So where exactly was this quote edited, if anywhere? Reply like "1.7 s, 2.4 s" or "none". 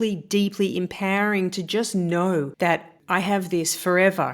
2.9 s